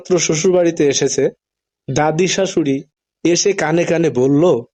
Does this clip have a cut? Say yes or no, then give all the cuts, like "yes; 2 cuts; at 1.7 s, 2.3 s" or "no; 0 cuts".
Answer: no; 0 cuts